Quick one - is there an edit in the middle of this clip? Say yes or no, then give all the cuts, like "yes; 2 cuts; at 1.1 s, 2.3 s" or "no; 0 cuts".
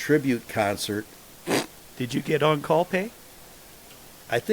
yes; 1 cut; at 1.8 s